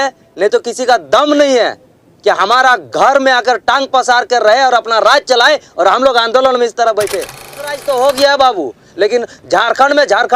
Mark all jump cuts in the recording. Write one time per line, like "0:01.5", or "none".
0:07.8